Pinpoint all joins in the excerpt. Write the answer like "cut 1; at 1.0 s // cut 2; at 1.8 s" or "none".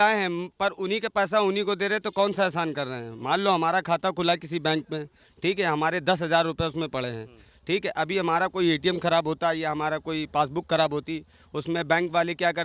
none